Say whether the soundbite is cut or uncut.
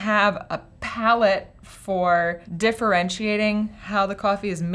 cut